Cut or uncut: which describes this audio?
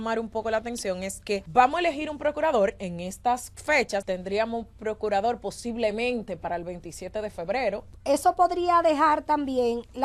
cut